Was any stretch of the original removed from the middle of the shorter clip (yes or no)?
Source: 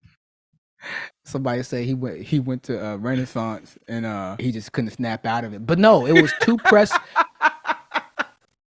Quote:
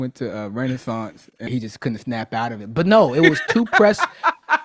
yes